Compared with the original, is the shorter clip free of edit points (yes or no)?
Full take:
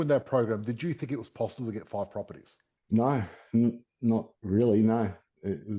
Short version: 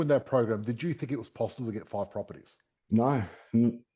yes